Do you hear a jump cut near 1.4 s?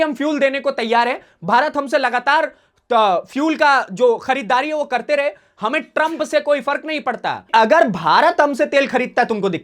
no; 1 cut; at 7.5 s

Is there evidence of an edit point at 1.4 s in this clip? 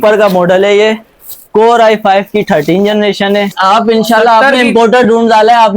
no; 1 cut; at 3.5 s

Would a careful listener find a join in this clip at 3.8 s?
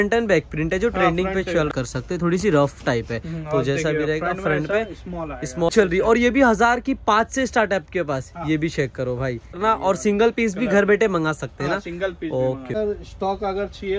no; 4 cuts; at 1.7 s, 5.7 s, 9.6 s, 12.7 s

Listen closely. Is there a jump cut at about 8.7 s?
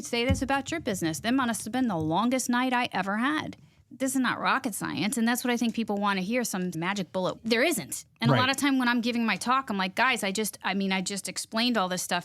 no; 2 cuts; at 3.9 s, 6.8 s

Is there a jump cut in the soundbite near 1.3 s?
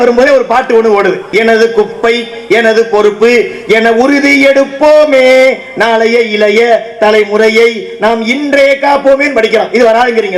yes; 1 cut; at 1.3 s

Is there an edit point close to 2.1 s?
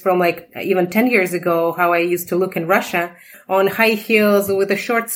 no; 1 cut; at 3.4 s

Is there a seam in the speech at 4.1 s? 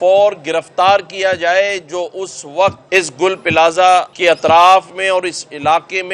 yes; 2 cuts; at 2.8 s, 4.1 s

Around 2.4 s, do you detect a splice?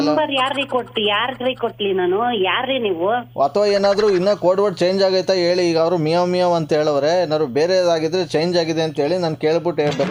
no; 0 cuts

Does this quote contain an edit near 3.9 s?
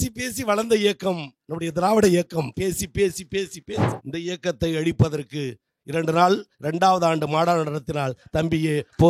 yes; 1 cut; at 3.9 s

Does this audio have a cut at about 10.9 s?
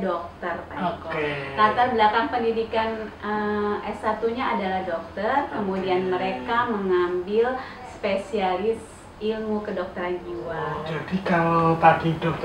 yes; 1 cut; at 10.9 s

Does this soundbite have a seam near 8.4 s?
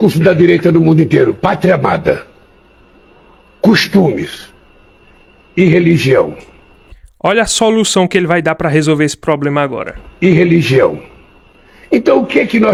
no; 0 cuts

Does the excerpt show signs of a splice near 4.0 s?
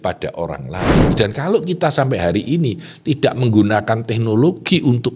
no; 1 cut; at 1.1 s

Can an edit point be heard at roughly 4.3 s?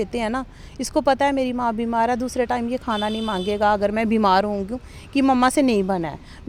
no; 0 cuts

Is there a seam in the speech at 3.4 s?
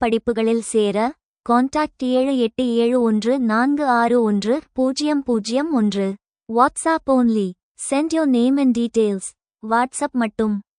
yes; 1 cut; at 3.4 s

